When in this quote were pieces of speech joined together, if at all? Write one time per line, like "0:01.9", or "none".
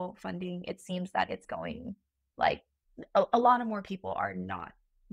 none